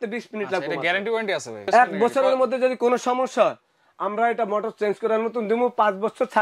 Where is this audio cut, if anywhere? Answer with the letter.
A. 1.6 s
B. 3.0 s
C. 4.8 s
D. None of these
A